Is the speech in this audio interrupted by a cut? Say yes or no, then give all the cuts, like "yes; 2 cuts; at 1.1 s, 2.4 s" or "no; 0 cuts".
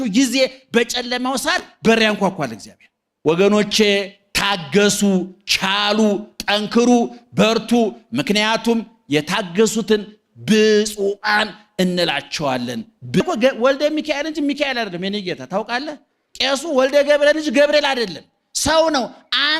yes; 2 cuts; at 3.0 s, 13.2 s